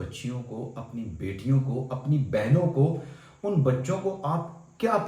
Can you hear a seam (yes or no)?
no